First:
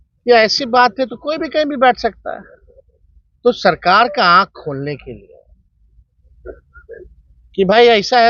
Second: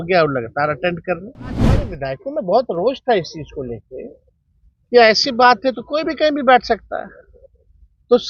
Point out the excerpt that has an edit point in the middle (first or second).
second